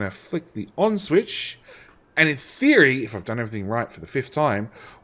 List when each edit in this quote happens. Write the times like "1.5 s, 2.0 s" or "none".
none